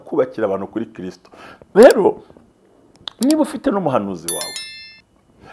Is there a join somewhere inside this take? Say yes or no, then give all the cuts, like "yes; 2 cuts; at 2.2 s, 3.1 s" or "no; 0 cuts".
no; 0 cuts